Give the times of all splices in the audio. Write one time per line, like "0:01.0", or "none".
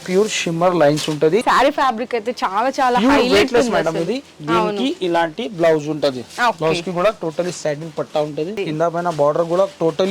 0:01.4
0:08.6